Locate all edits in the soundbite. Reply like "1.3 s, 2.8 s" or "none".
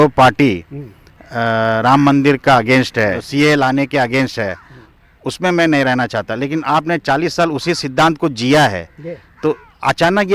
3.2 s